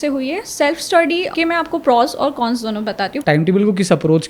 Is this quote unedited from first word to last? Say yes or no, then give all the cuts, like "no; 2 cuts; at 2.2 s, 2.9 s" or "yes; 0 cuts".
no; 2 cuts; at 1.3 s, 3.2 s